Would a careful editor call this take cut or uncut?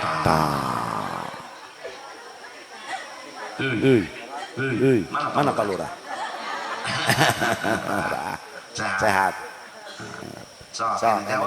uncut